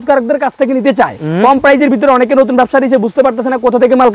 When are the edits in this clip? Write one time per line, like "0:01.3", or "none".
none